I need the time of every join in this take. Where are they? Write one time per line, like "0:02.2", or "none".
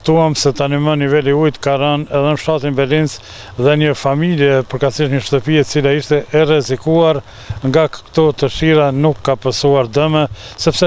none